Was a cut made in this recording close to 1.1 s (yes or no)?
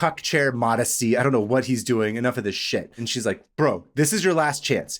no